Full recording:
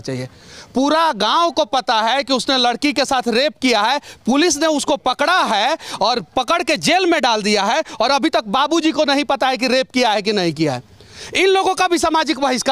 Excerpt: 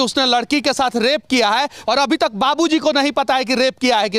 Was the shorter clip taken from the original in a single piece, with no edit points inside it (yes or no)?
no